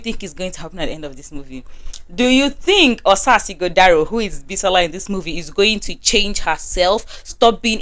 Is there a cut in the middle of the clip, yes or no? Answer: no